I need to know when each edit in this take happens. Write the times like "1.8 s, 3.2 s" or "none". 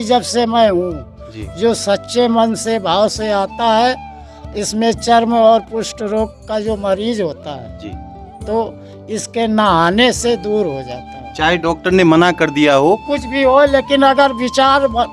none